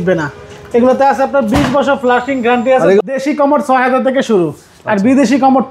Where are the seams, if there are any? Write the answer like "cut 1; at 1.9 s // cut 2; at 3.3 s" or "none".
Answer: cut 1; at 3.0 s